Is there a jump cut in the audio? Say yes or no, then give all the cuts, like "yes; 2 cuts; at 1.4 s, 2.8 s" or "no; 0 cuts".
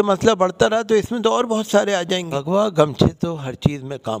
yes; 1 cut; at 2.4 s